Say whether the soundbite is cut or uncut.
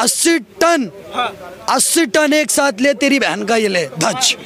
uncut